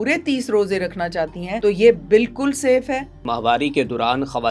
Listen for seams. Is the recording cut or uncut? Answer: cut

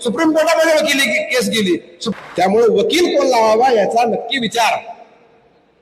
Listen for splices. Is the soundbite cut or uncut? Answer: cut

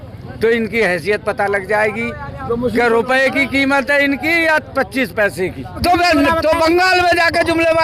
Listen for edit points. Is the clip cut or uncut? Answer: cut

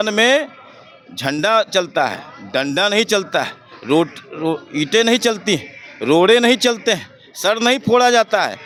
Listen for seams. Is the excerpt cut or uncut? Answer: uncut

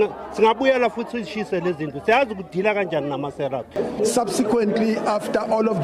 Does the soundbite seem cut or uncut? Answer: cut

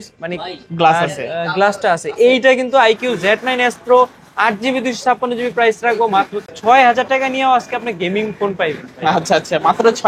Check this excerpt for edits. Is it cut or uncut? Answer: cut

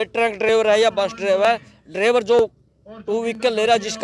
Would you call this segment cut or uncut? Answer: uncut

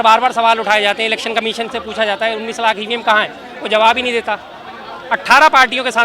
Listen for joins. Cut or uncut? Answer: uncut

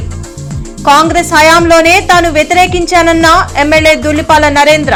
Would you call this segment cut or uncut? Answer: uncut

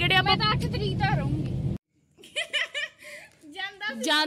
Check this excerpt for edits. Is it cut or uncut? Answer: cut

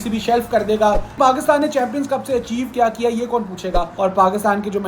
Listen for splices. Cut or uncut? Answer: cut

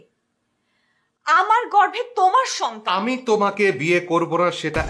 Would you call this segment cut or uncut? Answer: uncut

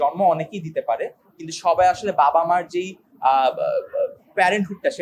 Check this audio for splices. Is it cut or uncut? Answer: uncut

